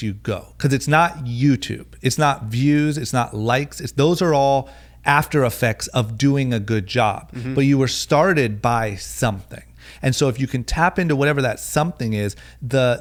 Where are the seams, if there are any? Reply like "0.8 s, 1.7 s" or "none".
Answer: none